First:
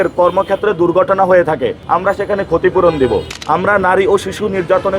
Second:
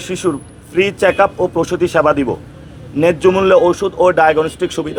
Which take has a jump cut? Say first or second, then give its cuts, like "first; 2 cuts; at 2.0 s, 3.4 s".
first; 2 cuts; at 1.8 s, 3.3 s